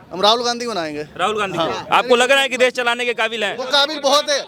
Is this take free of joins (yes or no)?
yes